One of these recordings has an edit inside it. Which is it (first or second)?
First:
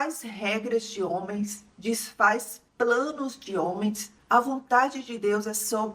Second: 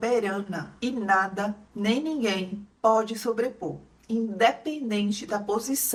first